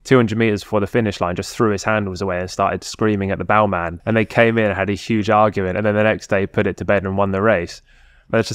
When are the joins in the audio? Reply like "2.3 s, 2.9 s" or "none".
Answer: 3.9 s